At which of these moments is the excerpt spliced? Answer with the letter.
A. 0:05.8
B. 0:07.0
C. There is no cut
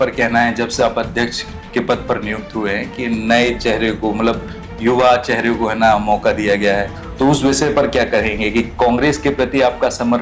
B